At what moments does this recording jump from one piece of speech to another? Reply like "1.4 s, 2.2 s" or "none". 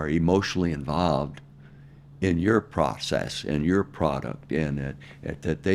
none